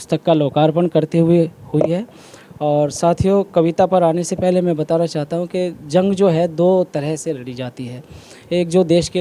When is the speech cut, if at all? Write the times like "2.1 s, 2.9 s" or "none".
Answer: none